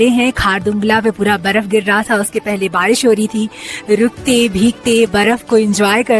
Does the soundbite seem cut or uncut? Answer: uncut